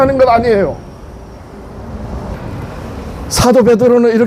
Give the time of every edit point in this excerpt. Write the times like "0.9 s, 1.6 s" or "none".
2.3 s